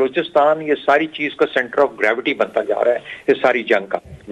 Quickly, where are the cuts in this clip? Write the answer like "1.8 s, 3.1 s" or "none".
none